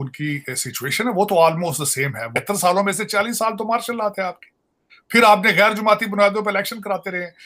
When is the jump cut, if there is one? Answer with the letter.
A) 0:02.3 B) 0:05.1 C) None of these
A